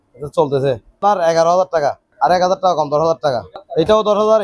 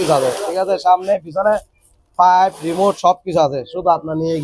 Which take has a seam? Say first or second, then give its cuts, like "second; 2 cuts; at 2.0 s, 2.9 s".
first; 3 cuts; at 1.0 s, 2.1 s, 3.5 s